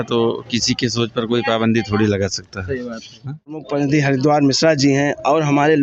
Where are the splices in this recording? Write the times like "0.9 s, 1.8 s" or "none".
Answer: 3.7 s

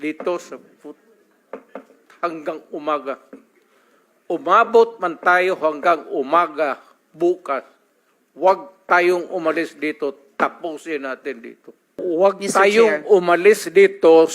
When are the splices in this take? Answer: 12.0 s

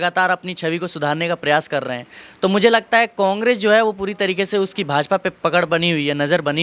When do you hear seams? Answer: none

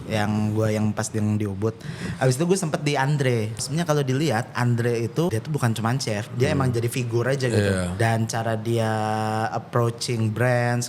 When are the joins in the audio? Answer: 3.6 s, 5.3 s, 7.9 s

